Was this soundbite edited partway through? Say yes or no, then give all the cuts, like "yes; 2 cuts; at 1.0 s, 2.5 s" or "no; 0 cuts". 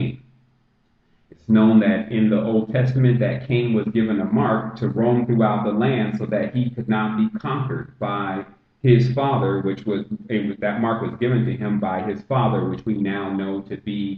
no; 0 cuts